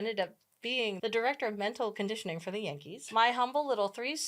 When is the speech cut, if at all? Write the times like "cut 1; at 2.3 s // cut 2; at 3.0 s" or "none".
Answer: cut 1; at 1.0 s // cut 2; at 3.0 s